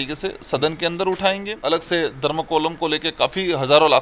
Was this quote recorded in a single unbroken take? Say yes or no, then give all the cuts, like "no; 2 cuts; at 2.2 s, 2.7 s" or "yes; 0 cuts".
no; 1 cut; at 1.5 s